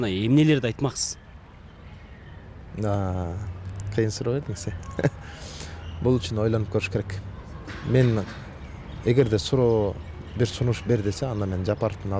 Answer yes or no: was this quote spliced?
no